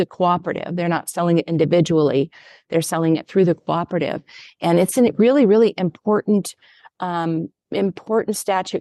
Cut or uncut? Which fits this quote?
uncut